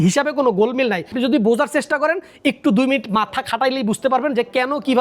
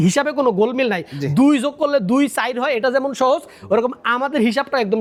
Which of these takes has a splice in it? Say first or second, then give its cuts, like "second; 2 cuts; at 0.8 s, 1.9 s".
first; 1 cut; at 1.1 s